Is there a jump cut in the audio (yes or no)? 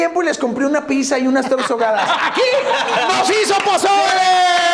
no